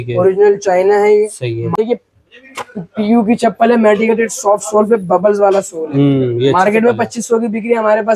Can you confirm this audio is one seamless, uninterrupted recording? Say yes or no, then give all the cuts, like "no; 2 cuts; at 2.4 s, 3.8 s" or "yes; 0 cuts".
no; 1 cut; at 1.8 s